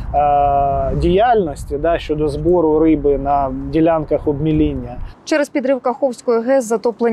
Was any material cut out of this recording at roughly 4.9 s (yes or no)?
no